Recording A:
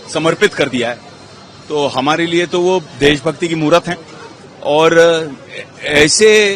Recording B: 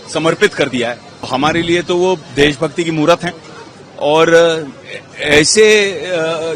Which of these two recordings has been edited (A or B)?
B